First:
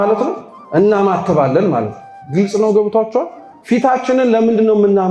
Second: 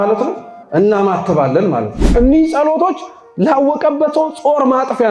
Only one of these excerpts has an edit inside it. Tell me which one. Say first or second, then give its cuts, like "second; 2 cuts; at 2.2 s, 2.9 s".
second; 1 cut; at 2.1 s